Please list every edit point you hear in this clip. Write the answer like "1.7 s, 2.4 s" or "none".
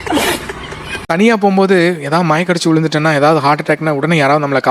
1.0 s